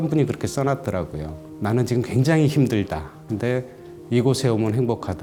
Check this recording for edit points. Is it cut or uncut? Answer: uncut